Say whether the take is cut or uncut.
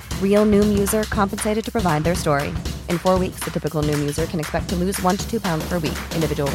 uncut